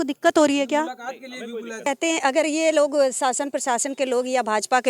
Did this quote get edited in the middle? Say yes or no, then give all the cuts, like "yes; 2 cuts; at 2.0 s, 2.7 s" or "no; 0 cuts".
yes; 1 cut; at 1.9 s